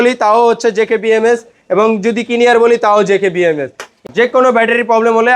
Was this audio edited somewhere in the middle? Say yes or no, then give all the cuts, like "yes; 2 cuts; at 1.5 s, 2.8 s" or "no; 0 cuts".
yes; 1 cut; at 4.0 s